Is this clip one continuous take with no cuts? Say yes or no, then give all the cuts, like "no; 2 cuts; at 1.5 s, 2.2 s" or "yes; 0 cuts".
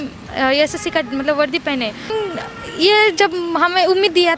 no; 1 cut; at 2.1 s